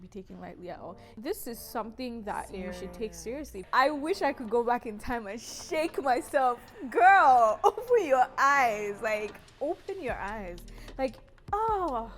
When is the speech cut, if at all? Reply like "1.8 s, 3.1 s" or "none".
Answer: 1.0 s, 3.7 s